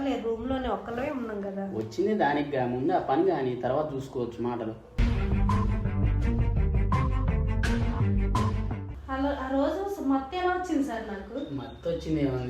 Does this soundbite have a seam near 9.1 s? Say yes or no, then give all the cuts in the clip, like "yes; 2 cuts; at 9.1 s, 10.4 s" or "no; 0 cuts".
yes; 2 cuts; at 5.0 s, 9.1 s